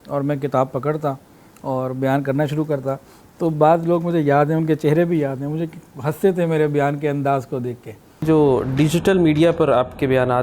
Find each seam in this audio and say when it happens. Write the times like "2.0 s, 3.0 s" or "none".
8.2 s